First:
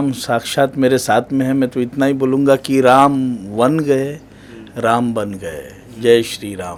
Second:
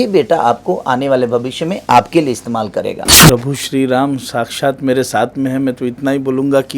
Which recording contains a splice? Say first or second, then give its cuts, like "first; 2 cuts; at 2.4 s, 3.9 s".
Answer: second; 1 cut; at 3.1 s